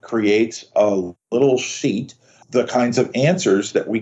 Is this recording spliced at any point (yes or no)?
yes